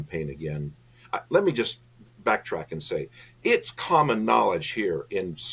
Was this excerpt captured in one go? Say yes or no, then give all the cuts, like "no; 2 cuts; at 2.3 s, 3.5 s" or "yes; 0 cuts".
yes; 0 cuts